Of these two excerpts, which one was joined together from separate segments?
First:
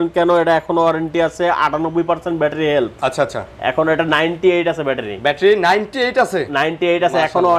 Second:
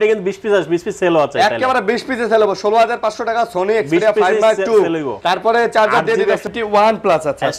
second; 2 cuts; at 5.1 s, 6.5 s

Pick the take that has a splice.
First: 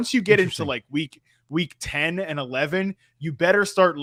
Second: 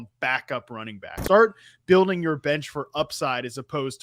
second; 1 cut; at 1.1 s

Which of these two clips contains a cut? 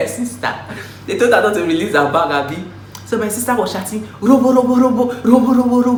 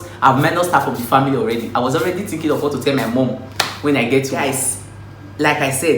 second; 1 cut; at 4.3 s

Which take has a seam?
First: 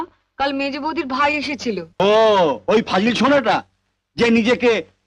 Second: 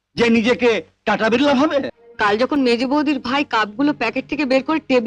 second; 1 cut; at 2.0 s

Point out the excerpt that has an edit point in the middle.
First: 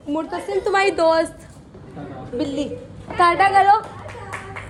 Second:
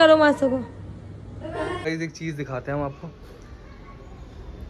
second; 1 cut; at 1.8 s

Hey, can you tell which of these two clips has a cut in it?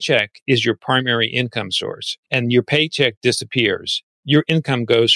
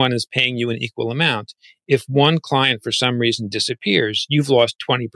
first; 1 cut; at 2.1 s

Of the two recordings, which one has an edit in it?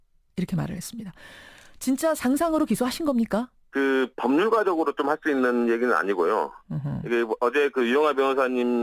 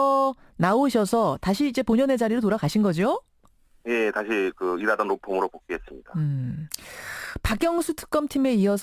second; 1 cut; at 5.8 s

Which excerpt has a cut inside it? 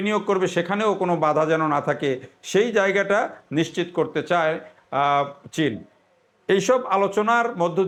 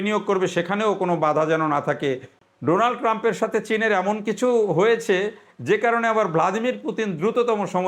second; 1 cut; at 2.3 s

